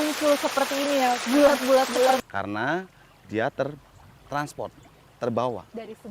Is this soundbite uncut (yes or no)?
no